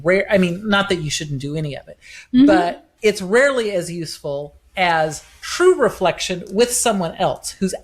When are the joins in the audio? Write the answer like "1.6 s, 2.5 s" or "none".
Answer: none